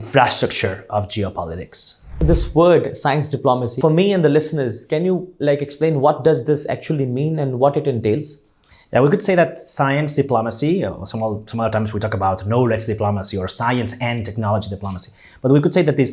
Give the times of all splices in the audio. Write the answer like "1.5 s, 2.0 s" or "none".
2.2 s, 3.7 s